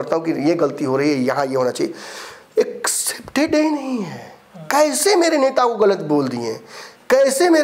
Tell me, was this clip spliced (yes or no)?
no